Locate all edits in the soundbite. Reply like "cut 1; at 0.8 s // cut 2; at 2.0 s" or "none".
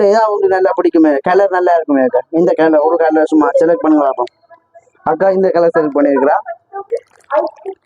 cut 1; at 6.8 s